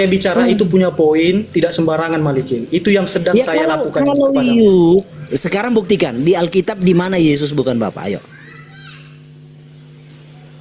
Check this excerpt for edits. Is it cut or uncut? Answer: uncut